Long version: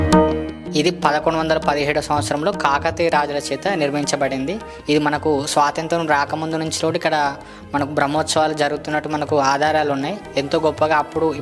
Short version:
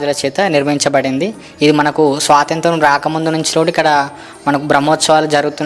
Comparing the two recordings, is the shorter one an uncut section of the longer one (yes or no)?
yes